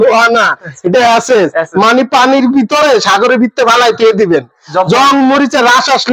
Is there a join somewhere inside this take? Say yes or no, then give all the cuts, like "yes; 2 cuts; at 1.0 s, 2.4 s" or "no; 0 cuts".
no; 0 cuts